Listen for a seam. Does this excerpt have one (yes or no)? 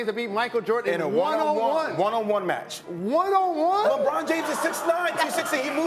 no